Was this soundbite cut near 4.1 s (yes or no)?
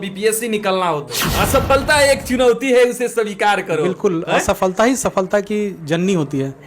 no